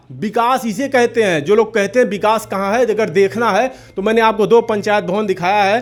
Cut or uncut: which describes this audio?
uncut